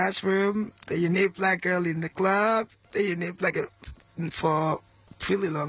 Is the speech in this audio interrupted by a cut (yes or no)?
no